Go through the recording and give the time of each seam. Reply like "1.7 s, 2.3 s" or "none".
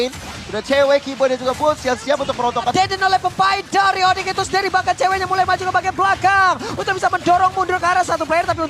2.7 s